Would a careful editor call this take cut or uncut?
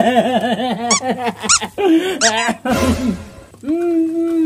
uncut